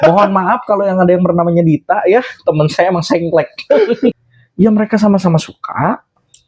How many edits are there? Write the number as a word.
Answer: one